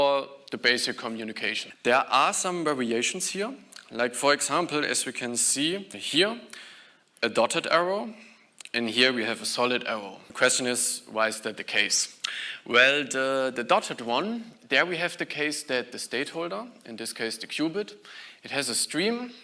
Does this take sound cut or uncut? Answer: cut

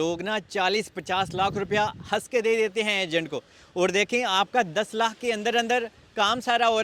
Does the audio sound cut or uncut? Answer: uncut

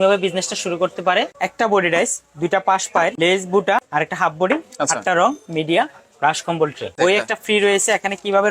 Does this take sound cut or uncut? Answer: cut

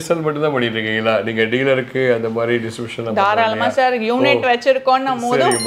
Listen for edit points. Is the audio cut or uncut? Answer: uncut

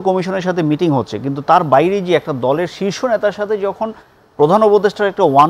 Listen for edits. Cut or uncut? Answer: uncut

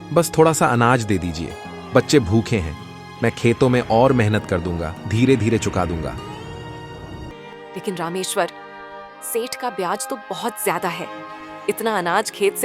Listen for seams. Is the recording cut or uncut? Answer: cut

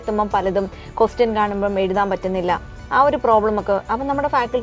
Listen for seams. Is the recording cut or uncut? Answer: uncut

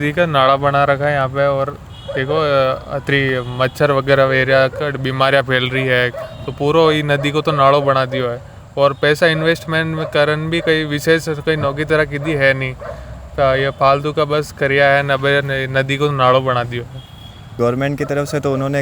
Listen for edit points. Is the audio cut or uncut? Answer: uncut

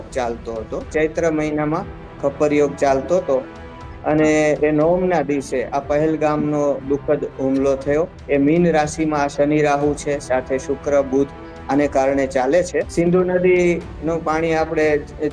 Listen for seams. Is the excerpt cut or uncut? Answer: cut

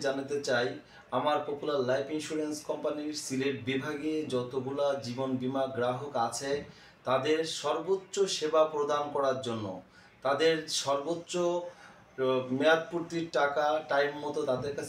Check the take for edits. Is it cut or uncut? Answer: uncut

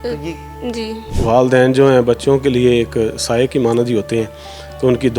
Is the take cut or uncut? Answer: cut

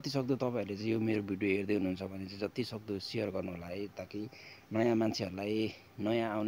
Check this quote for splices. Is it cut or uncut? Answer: uncut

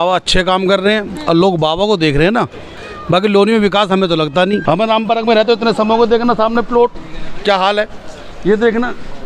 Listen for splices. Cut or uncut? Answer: cut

